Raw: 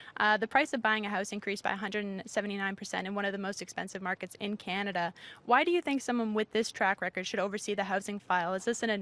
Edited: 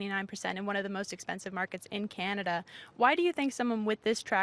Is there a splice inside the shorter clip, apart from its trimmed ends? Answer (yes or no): no